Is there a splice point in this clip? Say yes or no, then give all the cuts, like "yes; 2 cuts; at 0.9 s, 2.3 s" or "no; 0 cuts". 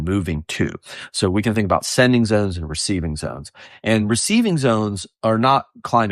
no; 0 cuts